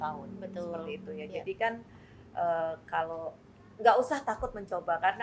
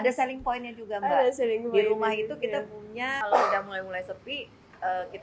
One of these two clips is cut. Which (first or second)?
second